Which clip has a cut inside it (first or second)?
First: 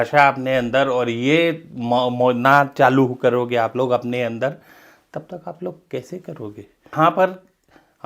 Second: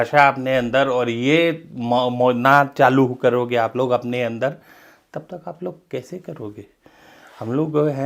first